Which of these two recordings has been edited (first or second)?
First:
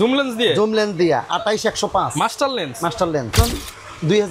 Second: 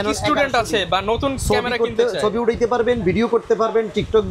first